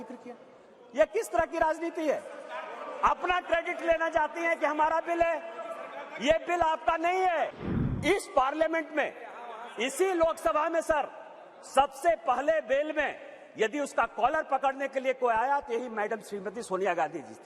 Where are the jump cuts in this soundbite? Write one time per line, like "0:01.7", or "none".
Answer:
0:07.6